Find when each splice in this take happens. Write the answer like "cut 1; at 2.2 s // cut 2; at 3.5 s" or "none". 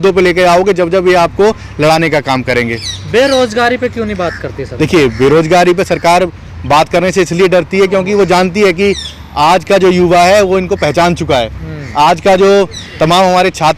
none